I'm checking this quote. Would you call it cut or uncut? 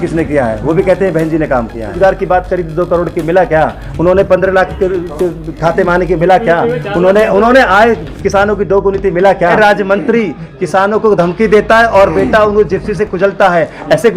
cut